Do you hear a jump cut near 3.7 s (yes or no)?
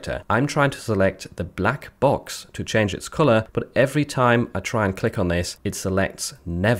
no